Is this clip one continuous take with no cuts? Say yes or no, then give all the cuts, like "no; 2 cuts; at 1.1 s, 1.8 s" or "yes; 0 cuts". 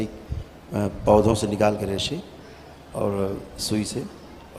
yes; 0 cuts